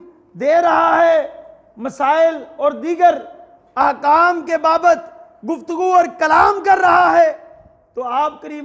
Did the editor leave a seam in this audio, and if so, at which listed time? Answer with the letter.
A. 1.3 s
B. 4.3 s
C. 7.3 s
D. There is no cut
D